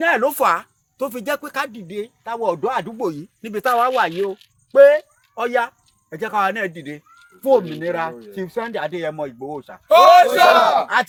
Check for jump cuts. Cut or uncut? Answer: uncut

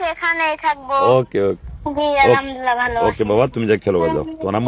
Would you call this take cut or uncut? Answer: cut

